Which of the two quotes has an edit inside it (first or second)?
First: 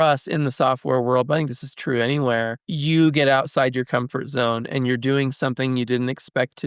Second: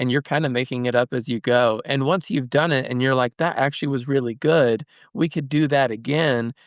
first